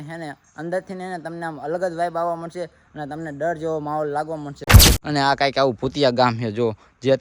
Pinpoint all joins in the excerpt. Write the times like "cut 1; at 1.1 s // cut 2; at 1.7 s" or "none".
cut 1; at 4.8 s